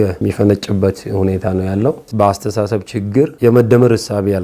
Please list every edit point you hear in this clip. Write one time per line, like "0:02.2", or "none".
0:02.1
0:03.3